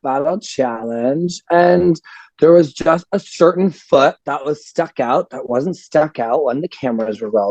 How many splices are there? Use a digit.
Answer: 0